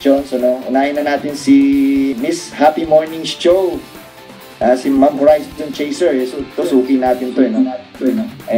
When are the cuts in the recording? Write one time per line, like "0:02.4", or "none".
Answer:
0:02.1